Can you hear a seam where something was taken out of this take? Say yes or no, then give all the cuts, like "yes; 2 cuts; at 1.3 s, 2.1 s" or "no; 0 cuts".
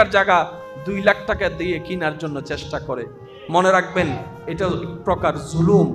no; 0 cuts